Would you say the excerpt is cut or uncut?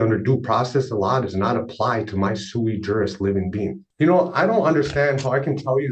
cut